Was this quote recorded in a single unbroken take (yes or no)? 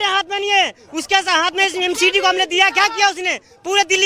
yes